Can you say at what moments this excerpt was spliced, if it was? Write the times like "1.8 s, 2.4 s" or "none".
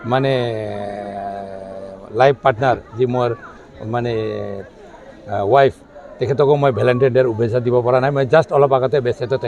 none

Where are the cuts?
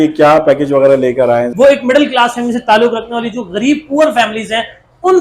1.5 s

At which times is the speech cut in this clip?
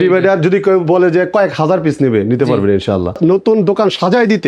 3.2 s

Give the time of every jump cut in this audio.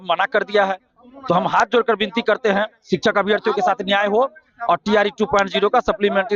none

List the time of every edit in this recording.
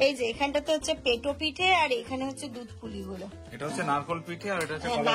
none

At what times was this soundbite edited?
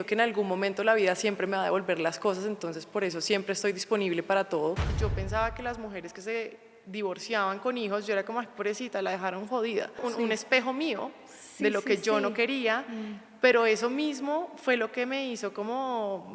4.9 s, 10.1 s

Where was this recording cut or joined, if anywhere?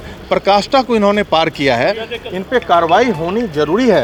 none

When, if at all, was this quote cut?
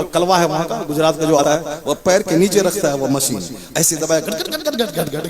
1.4 s

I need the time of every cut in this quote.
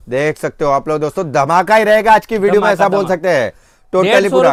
none

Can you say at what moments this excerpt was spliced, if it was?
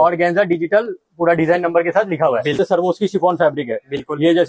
2.6 s

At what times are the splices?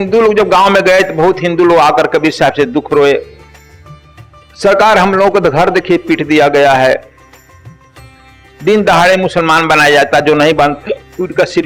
none

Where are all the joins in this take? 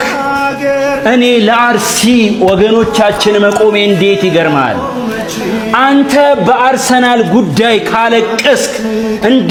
none

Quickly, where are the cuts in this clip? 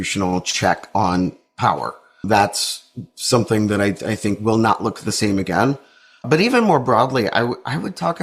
2.3 s

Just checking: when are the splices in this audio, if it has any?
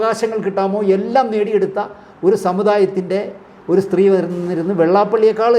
none

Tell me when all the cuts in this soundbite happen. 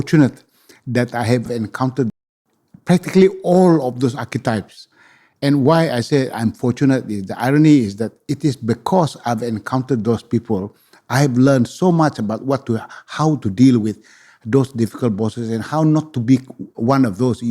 none

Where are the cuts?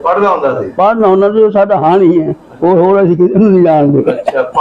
none

